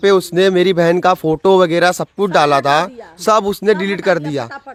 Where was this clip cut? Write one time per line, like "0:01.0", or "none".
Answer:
none